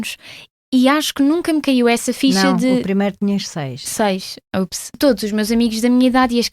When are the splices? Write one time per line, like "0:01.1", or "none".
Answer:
0:04.8